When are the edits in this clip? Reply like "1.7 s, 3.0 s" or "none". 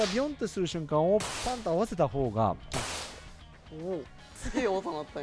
4.2 s